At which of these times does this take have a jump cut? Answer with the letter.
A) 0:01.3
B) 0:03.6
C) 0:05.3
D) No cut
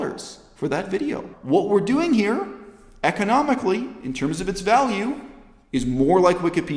A